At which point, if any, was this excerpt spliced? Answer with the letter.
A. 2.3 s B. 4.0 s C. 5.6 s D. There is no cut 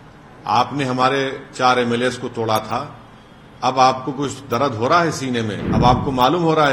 C